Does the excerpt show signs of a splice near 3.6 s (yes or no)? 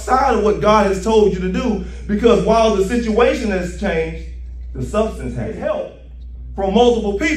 no